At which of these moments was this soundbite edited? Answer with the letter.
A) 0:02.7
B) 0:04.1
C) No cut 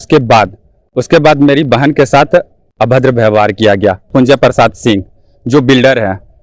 B